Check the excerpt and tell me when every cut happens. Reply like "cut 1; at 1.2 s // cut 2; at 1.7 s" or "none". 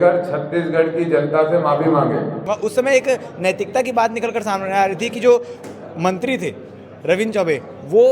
cut 1; at 2.5 s